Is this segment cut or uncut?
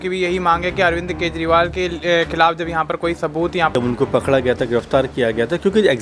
cut